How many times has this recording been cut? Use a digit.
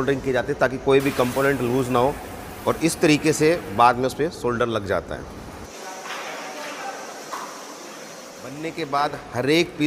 2